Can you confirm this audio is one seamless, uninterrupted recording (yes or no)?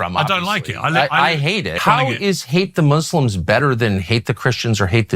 yes